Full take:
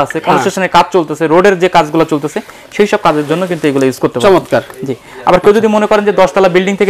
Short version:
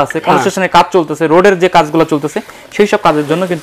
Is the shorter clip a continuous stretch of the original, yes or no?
yes